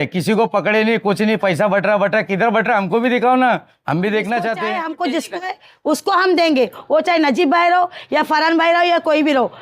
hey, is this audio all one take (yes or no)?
no